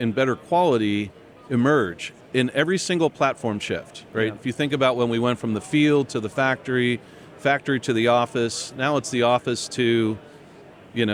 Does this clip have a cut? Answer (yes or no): no